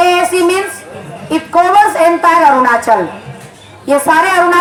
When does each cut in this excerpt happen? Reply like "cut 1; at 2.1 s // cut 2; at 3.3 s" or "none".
none

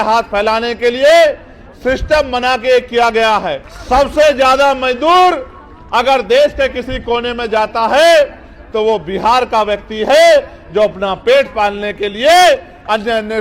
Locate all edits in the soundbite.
cut 1; at 3.7 s

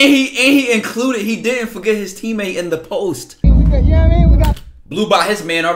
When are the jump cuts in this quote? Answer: cut 1; at 3.4 s

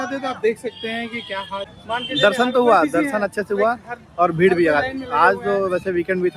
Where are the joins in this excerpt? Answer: cut 1; at 1.7 s

